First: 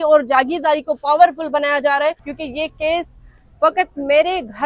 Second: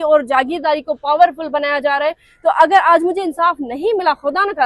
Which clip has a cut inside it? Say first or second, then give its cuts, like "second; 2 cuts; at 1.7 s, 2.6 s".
first; 1 cut; at 2.3 s